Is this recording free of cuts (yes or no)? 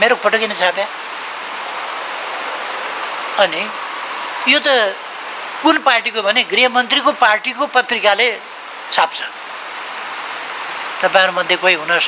yes